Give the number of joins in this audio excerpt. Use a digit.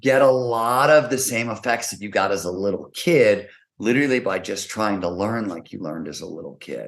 0